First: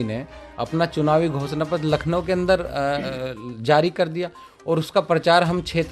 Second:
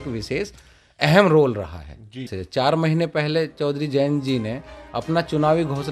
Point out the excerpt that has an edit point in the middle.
second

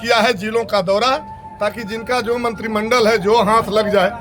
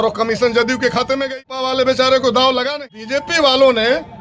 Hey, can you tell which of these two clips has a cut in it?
second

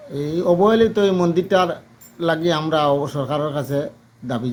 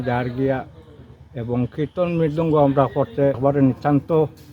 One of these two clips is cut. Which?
second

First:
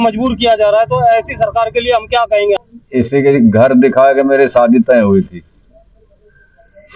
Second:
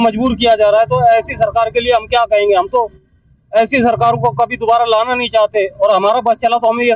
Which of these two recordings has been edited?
first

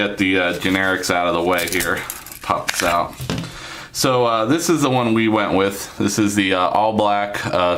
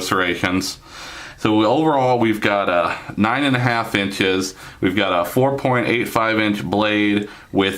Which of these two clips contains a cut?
second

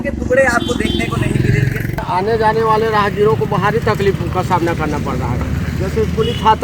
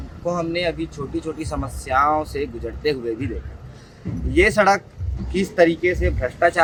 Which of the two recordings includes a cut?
first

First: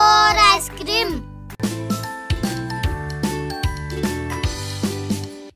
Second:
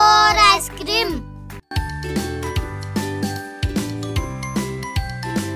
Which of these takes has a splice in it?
second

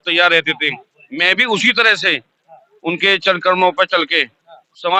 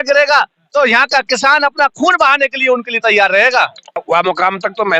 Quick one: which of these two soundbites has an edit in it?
second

